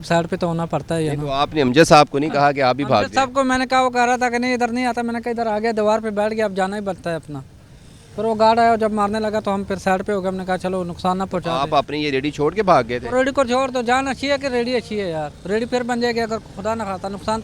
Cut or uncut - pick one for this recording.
uncut